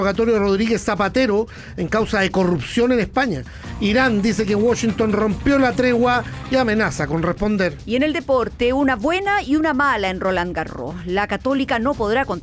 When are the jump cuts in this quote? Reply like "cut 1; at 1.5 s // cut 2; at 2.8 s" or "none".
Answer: none